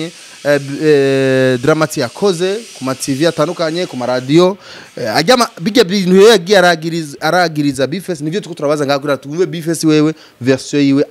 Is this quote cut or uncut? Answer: uncut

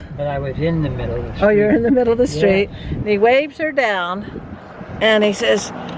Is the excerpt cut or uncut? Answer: uncut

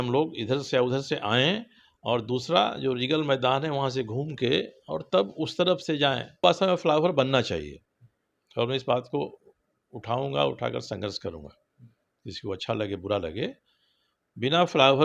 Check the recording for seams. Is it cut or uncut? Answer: cut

